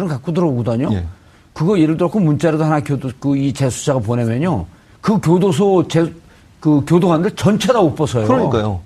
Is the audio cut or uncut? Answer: cut